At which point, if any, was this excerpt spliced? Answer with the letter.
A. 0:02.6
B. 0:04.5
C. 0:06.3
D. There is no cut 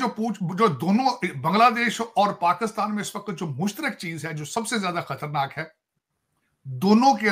D